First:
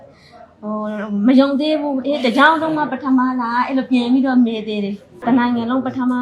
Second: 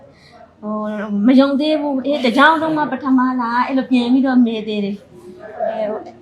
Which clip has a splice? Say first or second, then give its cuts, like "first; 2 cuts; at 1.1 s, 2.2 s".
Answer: first; 1 cut; at 5.2 s